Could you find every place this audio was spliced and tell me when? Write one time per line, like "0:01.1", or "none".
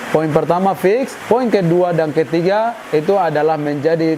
0:01.1
0:02.8